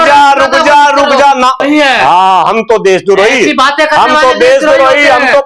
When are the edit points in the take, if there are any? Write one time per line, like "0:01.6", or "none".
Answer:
0:01.6